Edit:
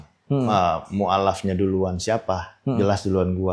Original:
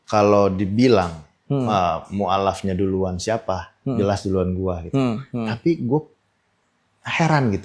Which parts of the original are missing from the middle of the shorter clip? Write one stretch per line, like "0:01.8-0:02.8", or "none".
none

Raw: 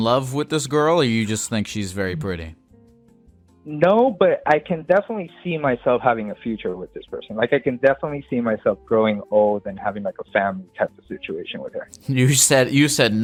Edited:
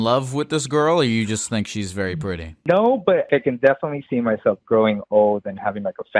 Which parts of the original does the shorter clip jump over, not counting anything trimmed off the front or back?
0:02.5-0:03.6
0:04.4-0:07.5

